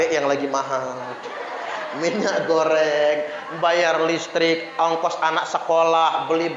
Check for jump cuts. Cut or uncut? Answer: uncut